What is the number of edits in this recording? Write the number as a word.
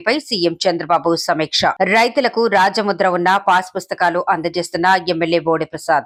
zero